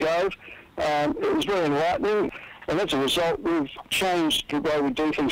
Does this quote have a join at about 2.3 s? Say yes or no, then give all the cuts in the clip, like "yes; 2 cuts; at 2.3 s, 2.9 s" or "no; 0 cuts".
yes; 2 cuts; at 2.3 s, 3.8 s